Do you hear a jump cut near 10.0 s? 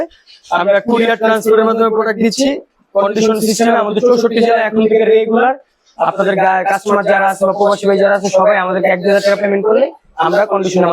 no; 0 cuts

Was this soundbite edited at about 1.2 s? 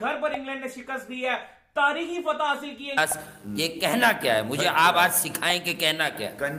no; 1 cut; at 3.0 s

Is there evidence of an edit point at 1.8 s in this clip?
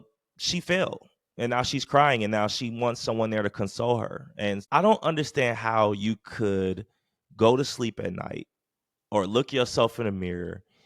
no; 1 cut; at 4.6 s

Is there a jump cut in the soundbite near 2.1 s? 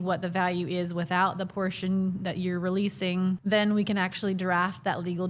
no; 1 cut; at 3.4 s

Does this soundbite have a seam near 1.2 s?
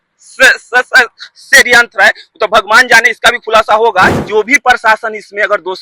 no; 1 cut; at 4.2 s

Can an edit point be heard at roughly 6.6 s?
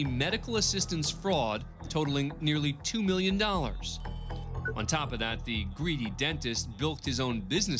no; 1 cut; at 1.7 s

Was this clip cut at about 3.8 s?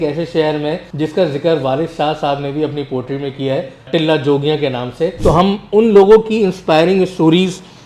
yes; 3 cuts; at 0.9 s, 3.8 s, 5.2 s

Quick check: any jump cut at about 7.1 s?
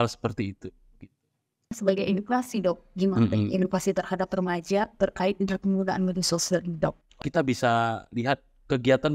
yes; 2 cuts; at 1.8 s, 7.1 s

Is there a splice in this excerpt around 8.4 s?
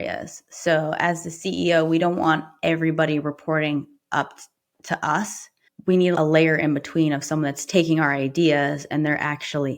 no; 1 cut; at 6.1 s

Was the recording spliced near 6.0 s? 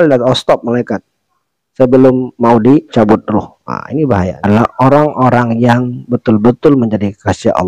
no; 1 cut; at 4.3 s

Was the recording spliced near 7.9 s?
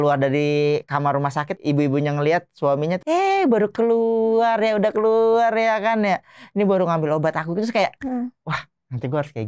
no; 2 cuts; at 1.5 s, 3.0 s

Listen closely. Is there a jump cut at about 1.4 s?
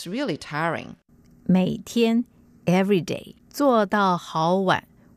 no; 0 cuts

